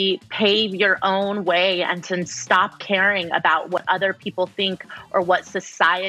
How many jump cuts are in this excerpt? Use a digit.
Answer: 0